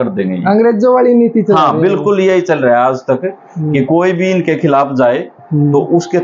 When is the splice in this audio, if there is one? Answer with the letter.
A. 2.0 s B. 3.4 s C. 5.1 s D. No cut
D